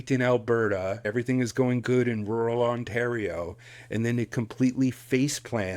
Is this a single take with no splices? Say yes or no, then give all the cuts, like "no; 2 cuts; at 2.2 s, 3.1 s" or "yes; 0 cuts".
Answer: no; 1 cut; at 1.0 s